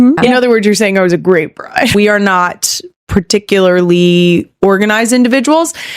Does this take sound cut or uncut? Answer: cut